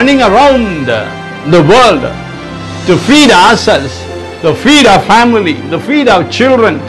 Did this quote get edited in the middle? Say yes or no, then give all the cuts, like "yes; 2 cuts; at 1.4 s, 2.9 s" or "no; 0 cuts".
no; 0 cuts